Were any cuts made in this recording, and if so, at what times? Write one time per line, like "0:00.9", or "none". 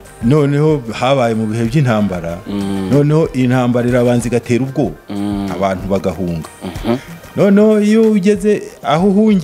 none